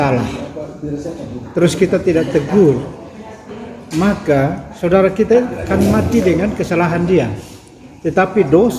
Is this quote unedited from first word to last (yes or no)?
yes